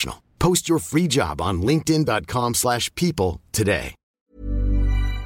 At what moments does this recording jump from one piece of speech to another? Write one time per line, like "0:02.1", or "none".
0:04.0